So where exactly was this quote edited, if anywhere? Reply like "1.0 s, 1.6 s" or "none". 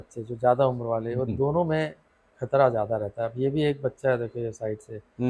none